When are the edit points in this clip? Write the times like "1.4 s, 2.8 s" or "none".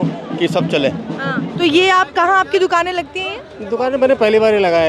1.5 s